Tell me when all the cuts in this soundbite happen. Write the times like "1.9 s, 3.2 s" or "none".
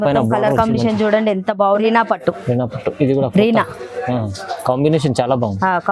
1.8 s